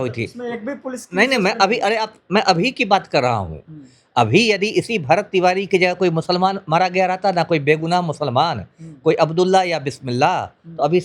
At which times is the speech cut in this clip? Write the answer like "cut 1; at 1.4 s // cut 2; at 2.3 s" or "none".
none